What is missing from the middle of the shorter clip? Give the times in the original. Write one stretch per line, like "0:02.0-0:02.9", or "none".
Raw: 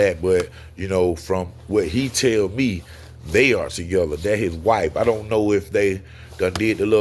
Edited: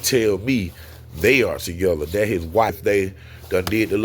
0:04.8-0:05.6